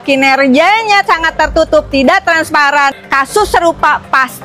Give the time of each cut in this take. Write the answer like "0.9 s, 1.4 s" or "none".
3.0 s